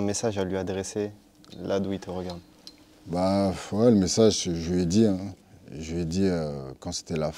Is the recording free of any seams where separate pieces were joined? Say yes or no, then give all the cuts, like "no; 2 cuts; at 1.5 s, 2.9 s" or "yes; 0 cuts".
yes; 0 cuts